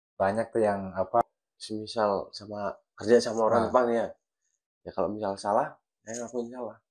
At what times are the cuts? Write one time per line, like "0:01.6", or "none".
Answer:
0:01.2